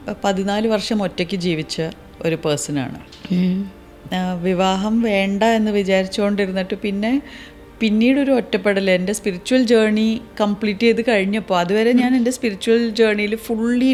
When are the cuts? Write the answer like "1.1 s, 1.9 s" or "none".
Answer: none